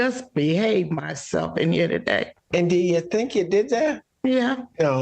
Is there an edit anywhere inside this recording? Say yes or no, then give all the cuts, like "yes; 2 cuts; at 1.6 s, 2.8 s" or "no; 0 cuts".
yes; 1 cut; at 2.4 s